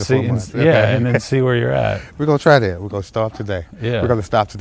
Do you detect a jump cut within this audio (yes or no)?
no